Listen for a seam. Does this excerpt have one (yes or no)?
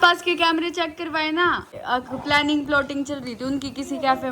yes